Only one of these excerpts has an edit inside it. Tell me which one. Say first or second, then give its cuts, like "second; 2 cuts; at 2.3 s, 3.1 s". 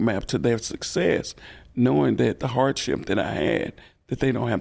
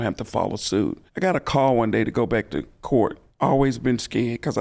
second; 2 cuts; at 1.0 s, 3.2 s